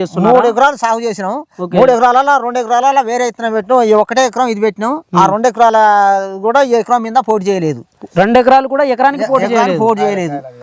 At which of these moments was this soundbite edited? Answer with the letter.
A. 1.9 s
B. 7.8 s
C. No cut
C